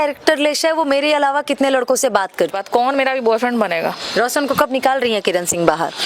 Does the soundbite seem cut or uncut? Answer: cut